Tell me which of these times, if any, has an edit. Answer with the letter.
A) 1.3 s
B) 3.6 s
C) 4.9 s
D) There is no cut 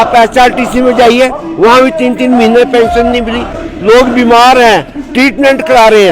B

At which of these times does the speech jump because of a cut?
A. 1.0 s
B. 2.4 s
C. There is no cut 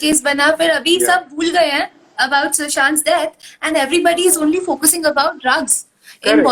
C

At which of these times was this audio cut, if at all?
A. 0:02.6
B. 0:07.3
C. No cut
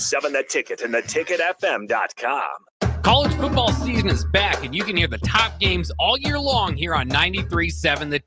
A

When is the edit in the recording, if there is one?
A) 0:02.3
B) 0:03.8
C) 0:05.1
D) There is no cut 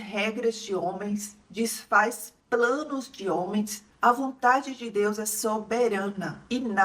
B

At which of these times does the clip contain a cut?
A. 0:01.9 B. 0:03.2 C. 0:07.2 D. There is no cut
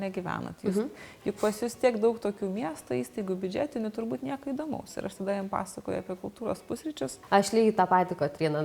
C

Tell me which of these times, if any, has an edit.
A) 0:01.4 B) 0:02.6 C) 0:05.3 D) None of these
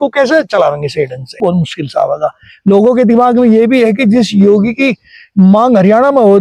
A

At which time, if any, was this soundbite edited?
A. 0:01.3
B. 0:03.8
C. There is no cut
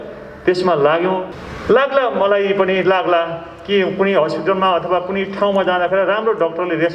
A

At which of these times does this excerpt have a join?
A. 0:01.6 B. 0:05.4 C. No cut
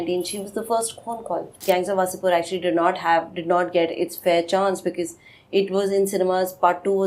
A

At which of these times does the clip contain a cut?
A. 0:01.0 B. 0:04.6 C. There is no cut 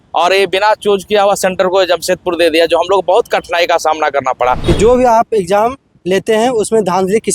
B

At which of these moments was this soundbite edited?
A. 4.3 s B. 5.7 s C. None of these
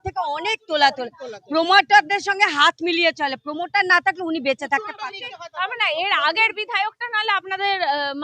C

